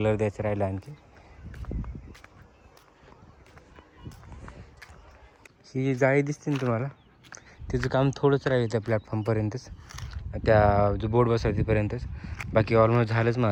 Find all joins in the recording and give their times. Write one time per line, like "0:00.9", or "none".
none